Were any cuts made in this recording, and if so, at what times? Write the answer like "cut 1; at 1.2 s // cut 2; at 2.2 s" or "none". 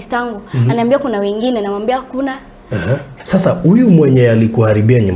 cut 1; at 3.1 s